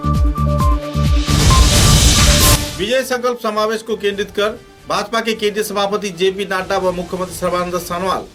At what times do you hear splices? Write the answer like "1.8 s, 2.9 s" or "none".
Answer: none